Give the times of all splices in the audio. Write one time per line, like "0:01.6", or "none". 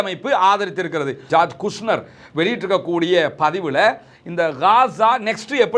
0:01.2